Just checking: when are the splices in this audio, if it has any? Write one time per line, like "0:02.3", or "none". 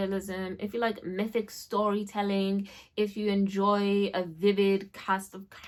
none